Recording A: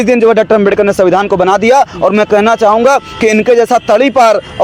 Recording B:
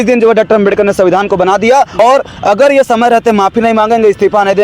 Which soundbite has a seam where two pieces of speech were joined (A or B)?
B